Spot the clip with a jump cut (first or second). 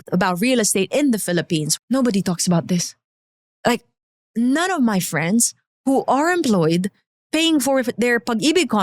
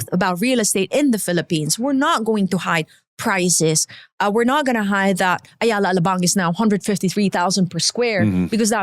first